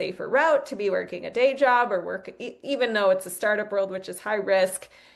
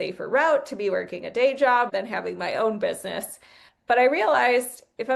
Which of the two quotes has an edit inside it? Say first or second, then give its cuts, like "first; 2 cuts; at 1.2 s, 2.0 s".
second; 1 cut; at 1.9 s